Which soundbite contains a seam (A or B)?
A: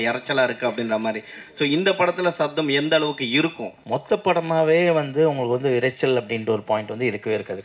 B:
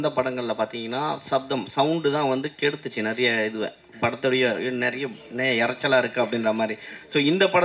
A